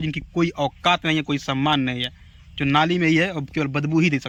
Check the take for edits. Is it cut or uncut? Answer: uncut